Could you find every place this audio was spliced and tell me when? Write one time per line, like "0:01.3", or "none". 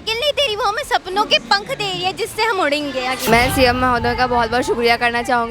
0:03.2